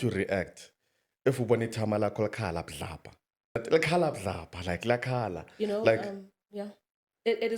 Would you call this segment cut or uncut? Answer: cut